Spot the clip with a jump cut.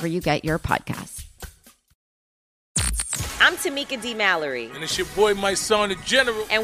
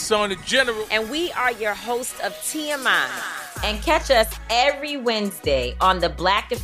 first; 1 cut; at 2.7 s

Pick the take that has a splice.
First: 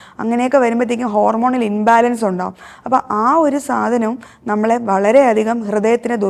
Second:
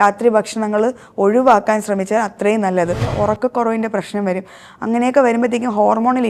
second; 1 cut; at 3.1 s

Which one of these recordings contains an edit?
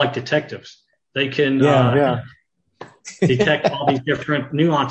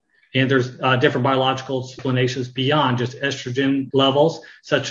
second; 2 cuts; at 2.0 s, 3.9 s

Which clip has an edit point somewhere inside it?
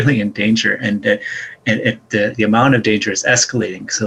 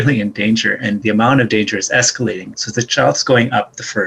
second; 2 cuts; at 1.0 s, 2.5 s

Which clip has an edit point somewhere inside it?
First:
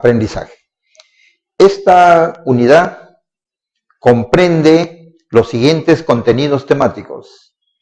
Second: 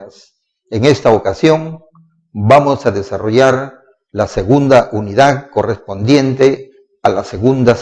first; 1 cut; at 1.4 s

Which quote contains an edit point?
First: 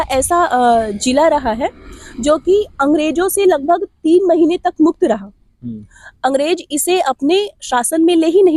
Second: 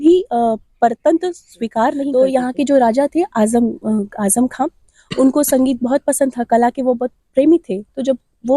second; 1 cut; at 2.1 s

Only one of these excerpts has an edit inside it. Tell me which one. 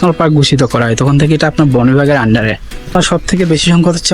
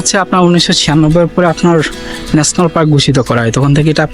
first; 1 cut; at 3.0 s

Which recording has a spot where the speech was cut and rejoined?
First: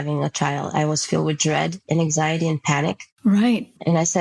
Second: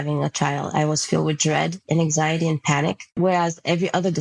second; 1 cut; at 3.1 s

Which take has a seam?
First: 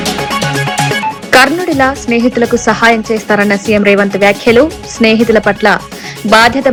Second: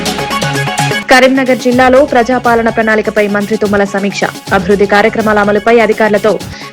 second; 1 cut; at 1.0 s

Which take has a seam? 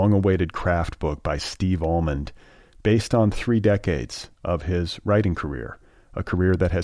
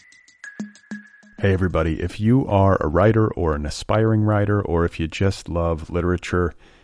second; 1 cut; at 1.0 s

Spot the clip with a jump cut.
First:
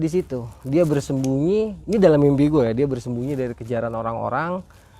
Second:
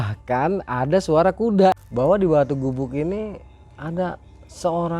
second; 1 cut; at 1.8 s

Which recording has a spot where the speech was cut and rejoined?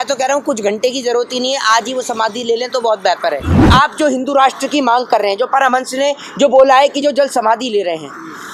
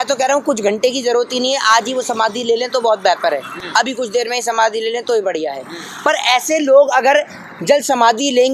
first; 1 cut; at 3.6 s

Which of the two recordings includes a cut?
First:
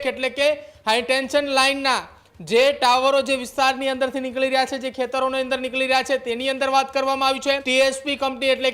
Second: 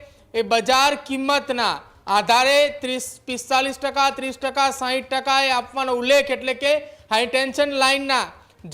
first; 1 cut; at 7.6 s

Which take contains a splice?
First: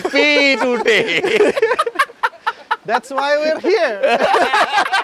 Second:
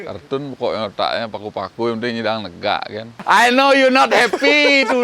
second; 1 cut; at 3.1 s

